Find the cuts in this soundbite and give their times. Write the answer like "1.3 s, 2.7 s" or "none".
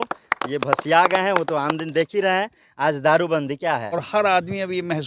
3.9 s